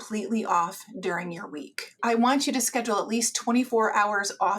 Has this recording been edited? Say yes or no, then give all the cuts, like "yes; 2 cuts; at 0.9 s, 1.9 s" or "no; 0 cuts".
yes; 2 cuts; at 2.0 s, 3.7 s